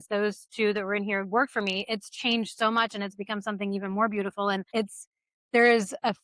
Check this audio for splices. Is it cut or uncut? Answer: cut